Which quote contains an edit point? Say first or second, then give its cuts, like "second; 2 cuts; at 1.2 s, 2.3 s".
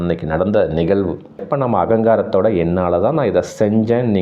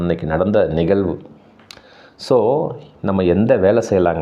first; 1 cut; at 1.4 s